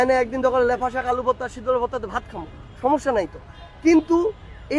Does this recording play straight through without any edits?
yes; 0 cuts

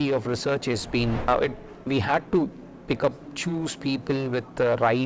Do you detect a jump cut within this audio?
yes; 1 cut; at 1.3 s

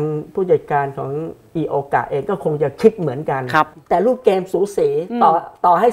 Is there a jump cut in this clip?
yes; 1 cut; at 3.8 s

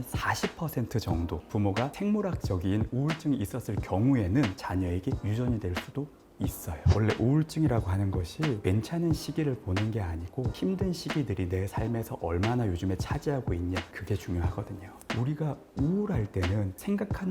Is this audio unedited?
no; 2 cuts; at 6.8 s, 15.1 s

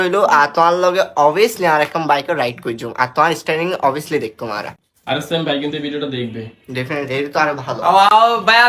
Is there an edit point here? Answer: no; 0 cuts

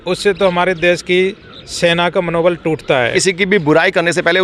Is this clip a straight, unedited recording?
no; 1 cut; at 3.1 s

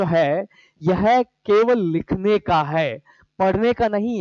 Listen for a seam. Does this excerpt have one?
no; 0 cuts

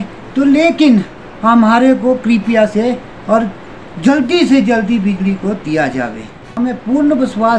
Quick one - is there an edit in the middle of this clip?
yes; 1 cut; at 6.5 s

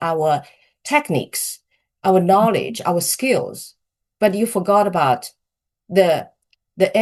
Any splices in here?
no; 0 cuts

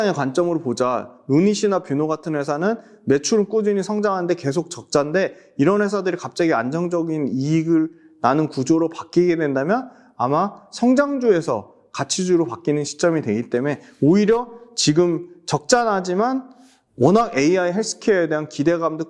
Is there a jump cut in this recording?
no; 0 cuts

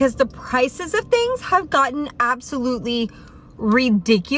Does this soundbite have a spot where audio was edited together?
no; 0 cuts

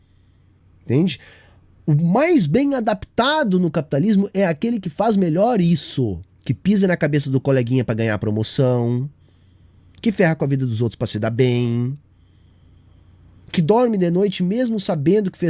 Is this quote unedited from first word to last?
yes; 0 cuts

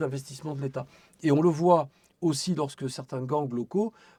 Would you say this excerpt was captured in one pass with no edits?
yes; 0 cuts

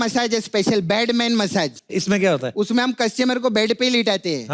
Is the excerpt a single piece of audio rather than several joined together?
no; 1 cut; at 1.8 s

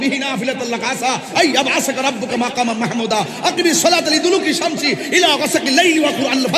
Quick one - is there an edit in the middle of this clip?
no; 0 cuts

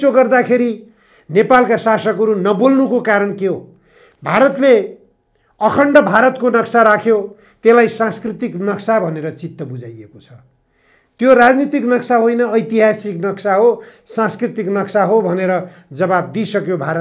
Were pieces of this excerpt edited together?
no; 0 cuts

